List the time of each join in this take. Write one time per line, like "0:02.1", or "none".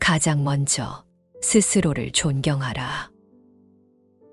0:03.4